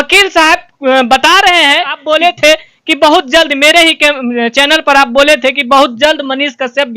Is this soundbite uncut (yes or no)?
no